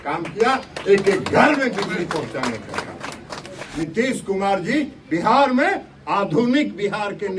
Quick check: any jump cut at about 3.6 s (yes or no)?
yes